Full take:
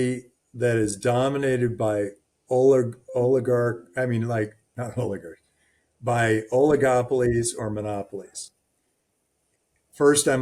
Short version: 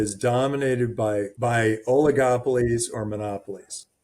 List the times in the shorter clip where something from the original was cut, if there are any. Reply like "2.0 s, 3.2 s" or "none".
1.3 s